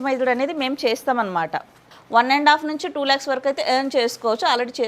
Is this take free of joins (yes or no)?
no